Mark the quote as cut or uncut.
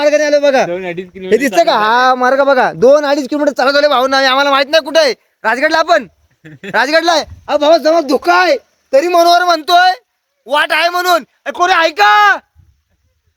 uncut